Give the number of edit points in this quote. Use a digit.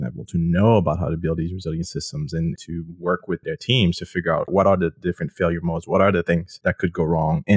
4